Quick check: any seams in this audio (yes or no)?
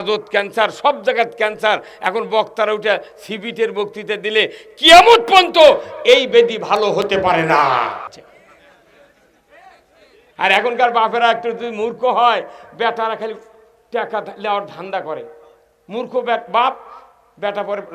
yes